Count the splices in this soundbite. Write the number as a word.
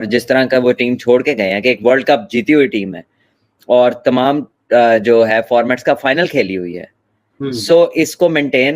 zero